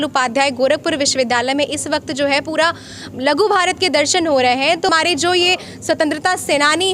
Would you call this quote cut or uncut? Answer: cut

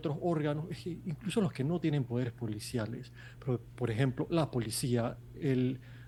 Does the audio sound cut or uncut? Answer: uncut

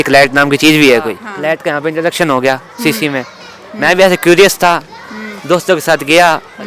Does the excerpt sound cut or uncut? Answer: cut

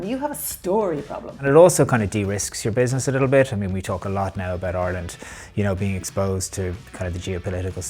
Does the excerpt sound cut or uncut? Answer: cut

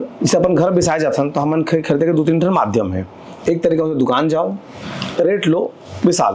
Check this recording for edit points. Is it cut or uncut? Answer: uncut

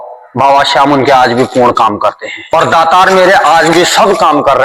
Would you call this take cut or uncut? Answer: cut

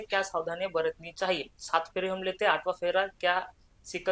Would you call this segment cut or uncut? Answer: uncut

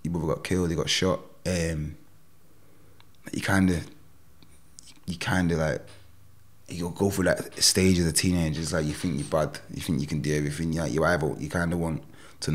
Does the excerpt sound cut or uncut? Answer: uncut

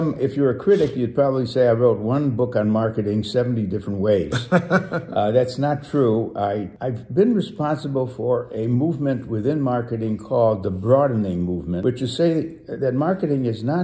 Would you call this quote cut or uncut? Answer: uncut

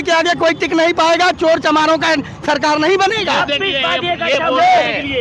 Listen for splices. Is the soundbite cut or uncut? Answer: uncut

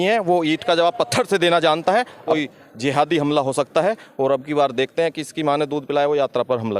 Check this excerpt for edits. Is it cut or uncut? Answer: cut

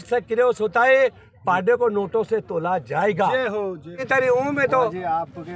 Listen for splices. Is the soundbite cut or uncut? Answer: cut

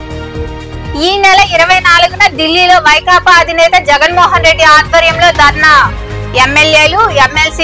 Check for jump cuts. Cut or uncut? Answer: cut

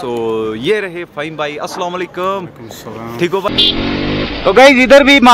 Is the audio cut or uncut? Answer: cut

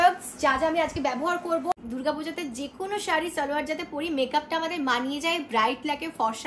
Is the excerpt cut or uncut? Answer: cut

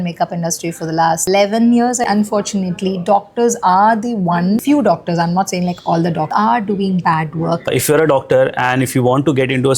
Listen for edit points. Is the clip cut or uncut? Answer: cut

